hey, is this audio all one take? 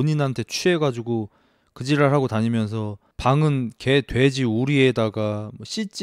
yes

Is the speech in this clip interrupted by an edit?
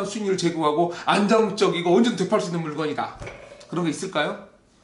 no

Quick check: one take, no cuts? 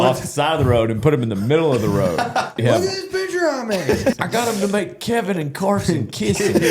no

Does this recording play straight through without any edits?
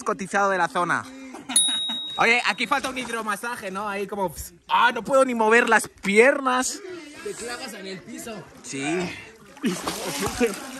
yes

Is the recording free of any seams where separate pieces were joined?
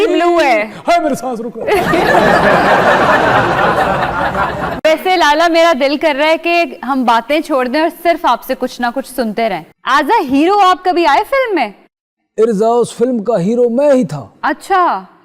no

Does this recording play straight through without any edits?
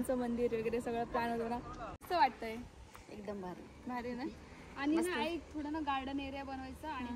no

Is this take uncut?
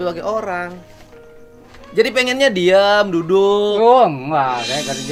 yes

